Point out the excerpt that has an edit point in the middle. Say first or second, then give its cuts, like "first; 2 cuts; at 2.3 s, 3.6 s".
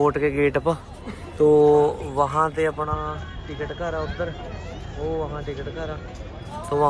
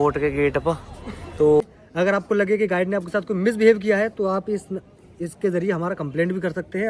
second; 1 cut; at 1.6 s